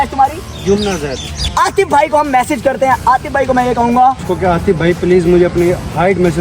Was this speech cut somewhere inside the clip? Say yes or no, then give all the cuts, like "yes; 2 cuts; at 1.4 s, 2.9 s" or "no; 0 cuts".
yes; 2 cuts; at 1.3 s, 4.2 s